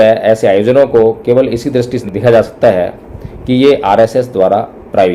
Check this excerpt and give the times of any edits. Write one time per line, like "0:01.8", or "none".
0:02.0